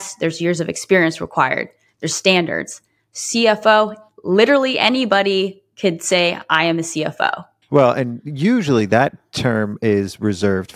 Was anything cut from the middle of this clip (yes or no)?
no